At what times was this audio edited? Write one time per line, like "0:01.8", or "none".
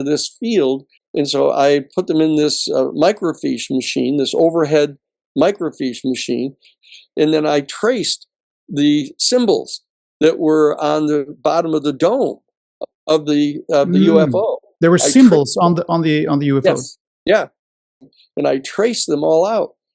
0:00.9
0:06.7
0:18.1